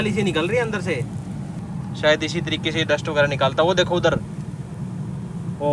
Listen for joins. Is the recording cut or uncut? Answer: cut